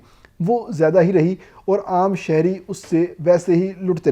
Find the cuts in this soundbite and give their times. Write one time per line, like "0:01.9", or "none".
none